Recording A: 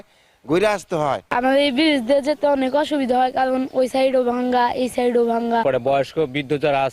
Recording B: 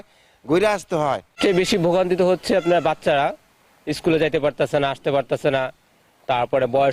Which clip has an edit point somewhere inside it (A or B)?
A